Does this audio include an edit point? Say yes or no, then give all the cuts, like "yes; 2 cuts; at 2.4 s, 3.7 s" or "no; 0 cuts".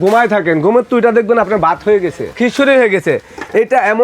yes; 1 cut; at 2.3 s